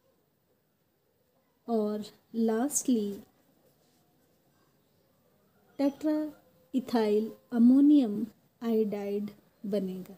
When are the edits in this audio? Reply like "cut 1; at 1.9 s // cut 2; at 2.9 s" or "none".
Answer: none